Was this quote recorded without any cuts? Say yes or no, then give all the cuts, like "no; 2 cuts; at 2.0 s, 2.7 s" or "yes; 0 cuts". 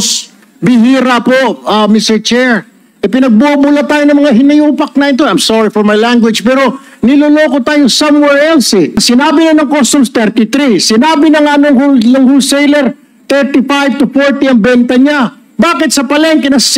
no; 1 cut; at 9.0 s